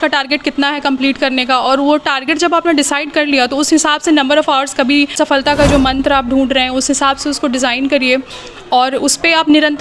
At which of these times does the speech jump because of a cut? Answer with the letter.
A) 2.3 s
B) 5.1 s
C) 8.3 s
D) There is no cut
B